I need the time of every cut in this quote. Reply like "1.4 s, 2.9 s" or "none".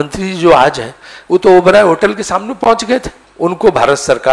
3.2 s